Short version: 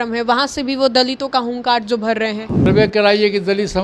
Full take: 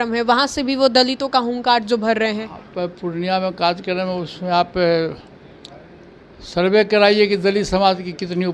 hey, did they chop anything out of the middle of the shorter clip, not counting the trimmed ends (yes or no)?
yes